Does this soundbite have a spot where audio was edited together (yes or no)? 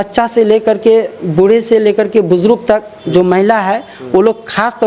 no